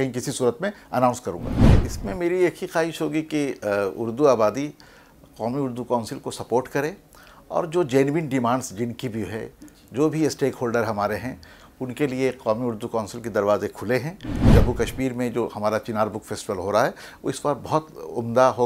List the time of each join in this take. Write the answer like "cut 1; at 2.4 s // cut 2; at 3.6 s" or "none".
cut 1; at 1.5 s // cut 2; at 14.4 s